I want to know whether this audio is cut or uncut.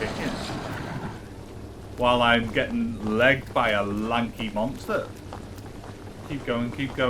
cut